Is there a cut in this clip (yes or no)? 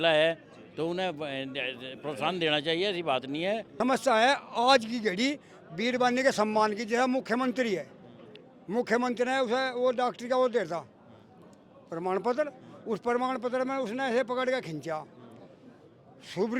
yes